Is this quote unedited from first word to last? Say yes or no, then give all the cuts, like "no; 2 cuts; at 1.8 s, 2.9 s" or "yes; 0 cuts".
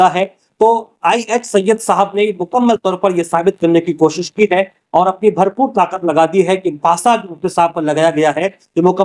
yes; 0 cuts